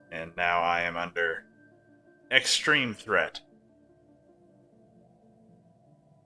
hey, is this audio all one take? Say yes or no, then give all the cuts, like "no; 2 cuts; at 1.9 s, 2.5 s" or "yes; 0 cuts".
yes; 0 cuts